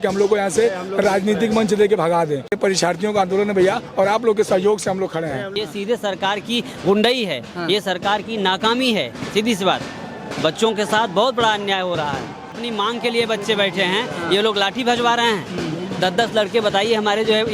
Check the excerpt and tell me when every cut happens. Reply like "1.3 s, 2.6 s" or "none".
2.6 s, 5.5 s, 12.5 s